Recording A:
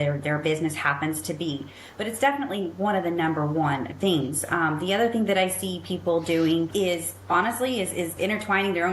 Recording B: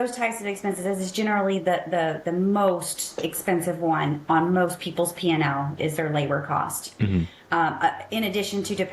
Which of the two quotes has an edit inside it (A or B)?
A